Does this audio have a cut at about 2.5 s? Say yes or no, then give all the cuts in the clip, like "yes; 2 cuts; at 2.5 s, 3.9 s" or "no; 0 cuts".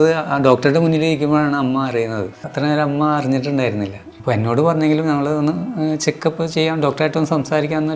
yes; 2 cuts; at 2.5 s, 4.1 s